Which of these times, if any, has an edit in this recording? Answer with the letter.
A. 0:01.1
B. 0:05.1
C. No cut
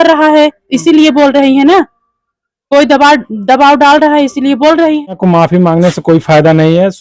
B